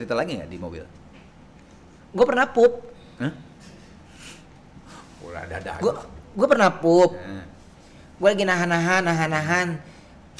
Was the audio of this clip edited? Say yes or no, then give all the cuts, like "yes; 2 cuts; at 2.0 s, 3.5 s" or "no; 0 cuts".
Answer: no; 0 cuts